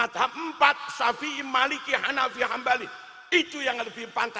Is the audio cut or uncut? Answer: uncut